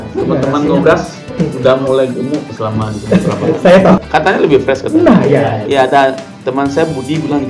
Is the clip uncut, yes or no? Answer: no